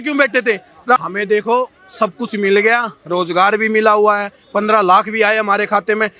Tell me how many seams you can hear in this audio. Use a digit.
1